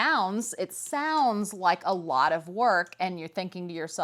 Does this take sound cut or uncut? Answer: uncut